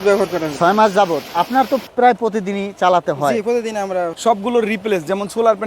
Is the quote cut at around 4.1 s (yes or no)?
yes